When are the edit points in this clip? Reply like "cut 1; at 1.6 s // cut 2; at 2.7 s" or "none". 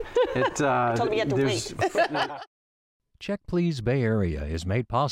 cut 1; at 2.3 s